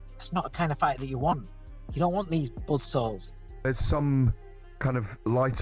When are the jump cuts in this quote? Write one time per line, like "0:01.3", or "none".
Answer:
0:03.6